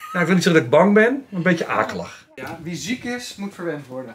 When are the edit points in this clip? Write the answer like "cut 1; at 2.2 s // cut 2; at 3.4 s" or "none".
cut 1; at 2.2 s